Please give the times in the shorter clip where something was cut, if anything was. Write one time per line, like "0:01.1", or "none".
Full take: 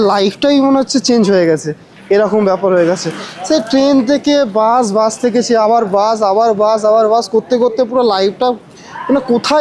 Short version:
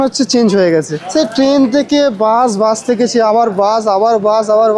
0:01.0